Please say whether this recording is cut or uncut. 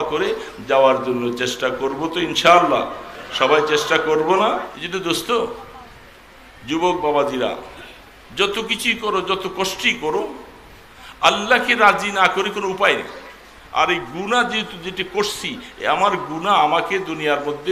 cut